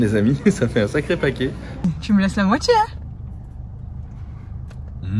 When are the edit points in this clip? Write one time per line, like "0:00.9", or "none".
0:01.8